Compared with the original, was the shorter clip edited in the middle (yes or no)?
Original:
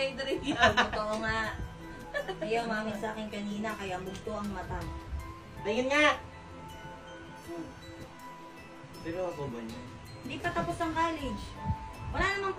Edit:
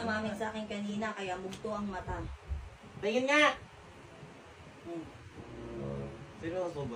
no